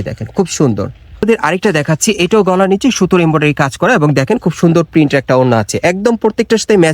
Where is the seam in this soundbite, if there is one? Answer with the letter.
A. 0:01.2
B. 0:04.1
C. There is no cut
A